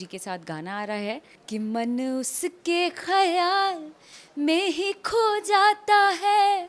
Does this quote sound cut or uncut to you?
cut